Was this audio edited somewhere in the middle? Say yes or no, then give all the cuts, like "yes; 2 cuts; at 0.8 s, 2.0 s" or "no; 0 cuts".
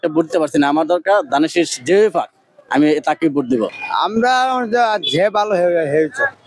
no; 0 cuts